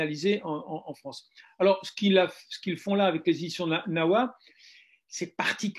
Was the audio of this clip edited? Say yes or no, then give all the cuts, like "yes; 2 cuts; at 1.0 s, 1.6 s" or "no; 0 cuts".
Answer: no; 0 cuts